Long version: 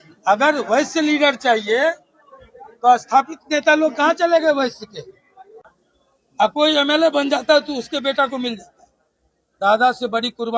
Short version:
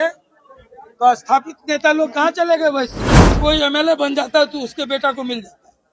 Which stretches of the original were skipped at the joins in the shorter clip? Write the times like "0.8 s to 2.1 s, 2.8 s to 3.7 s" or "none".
5.2 s to 6.5 s